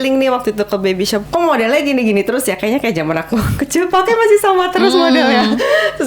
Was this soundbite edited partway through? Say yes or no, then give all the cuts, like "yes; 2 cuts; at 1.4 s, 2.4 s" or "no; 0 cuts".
yes; 1 cut; at 1.3 s